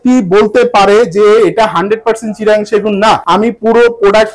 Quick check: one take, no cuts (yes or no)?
no